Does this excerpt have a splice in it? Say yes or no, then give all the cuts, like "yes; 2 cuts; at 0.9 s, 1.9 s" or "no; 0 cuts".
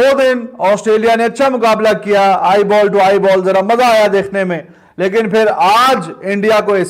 no; 0 cuts